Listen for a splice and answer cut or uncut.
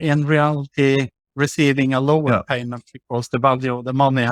uncut